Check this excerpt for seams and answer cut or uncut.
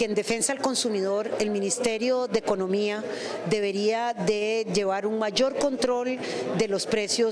uncut